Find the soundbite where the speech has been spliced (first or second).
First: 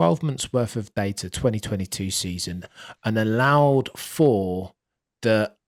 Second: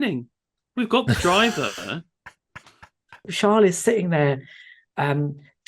second